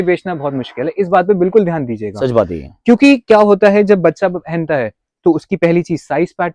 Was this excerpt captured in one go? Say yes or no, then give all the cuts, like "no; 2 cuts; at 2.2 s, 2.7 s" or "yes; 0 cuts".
yes; 0 cuts